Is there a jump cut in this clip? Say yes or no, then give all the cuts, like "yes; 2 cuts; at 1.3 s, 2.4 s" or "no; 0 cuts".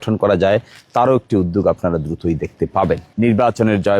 yes; 1 cut; at 3.1 s